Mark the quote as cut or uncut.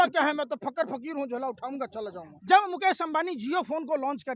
cut